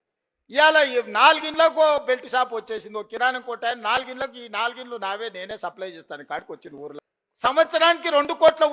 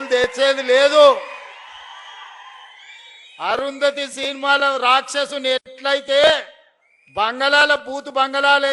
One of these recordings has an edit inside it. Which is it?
first; 1 cut; at 6.8 s

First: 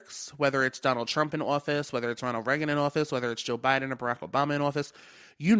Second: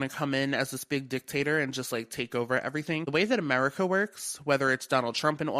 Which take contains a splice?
second; 1 cut; at 3.1 s

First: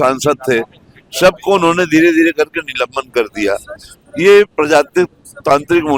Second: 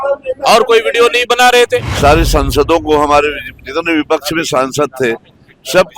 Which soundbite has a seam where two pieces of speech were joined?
second; 1 cut; at 1.9 s

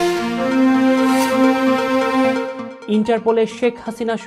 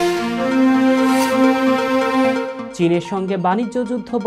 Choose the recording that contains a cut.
second; 1 cut; at 2.6 s

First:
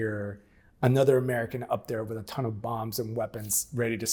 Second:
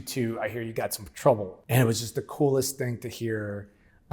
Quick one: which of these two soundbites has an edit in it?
second; 1 cut; at 1.5 s

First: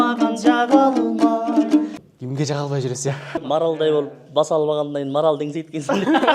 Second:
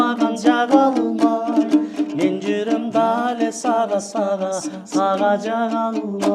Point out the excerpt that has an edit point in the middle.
first; 2 cuts; at 1.9 s, 3.5 s

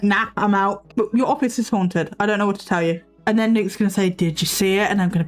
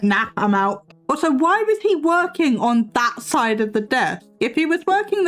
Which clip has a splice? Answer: first; 2 cuts; at 0.8 s, 3.1 s

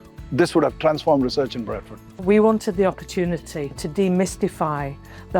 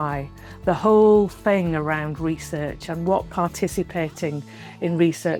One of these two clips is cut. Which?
first; 1 cut; at 2.1 s

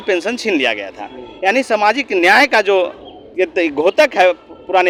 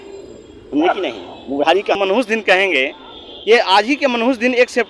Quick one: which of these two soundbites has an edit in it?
second; 1 cut; at 1.9 s

